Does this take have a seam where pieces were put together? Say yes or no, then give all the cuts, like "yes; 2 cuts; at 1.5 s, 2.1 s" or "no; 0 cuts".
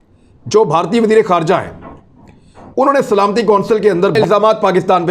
yes; 1 cut; at 4.1 s